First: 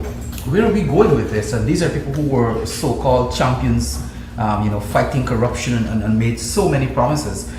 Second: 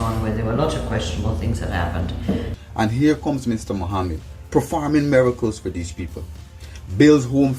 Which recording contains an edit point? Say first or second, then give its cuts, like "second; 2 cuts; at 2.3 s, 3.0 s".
second; 1 cut; at 2.5 s